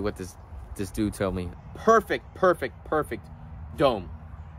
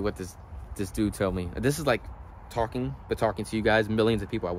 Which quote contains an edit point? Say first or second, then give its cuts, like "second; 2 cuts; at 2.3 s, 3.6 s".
first; 1 cut; at 1.5 s